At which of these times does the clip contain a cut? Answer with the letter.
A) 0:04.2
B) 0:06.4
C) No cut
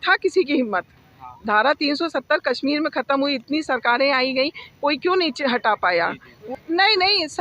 B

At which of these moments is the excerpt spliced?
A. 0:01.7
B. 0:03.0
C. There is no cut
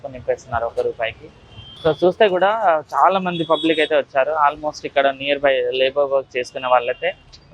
A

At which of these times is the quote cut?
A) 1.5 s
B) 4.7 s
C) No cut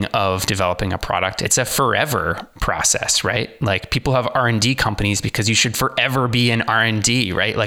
A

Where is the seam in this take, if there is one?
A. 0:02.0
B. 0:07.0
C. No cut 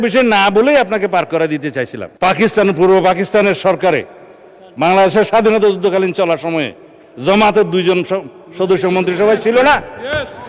A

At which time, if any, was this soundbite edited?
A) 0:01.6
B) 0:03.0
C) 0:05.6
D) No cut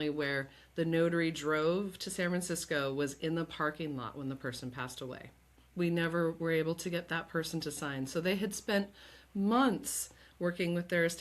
C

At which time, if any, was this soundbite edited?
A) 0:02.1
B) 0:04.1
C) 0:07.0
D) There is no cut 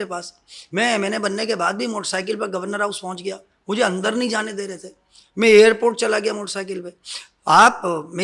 D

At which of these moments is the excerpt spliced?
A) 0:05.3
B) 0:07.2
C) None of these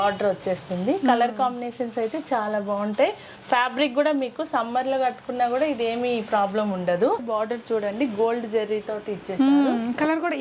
B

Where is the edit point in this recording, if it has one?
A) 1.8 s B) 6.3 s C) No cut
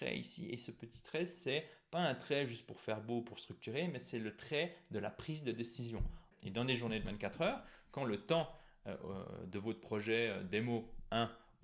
B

